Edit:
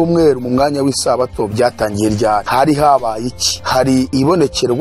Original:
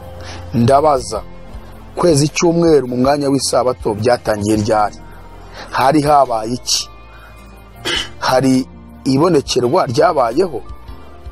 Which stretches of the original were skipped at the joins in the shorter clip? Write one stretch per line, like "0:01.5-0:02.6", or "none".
0:04.9-0:05.7
0:07.2-0:08.8